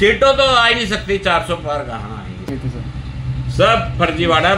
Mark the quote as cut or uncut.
cut